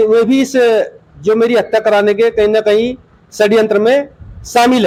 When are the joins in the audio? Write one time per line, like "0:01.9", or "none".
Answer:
none